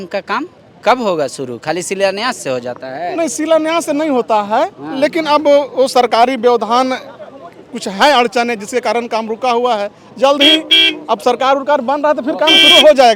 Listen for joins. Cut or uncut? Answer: uncut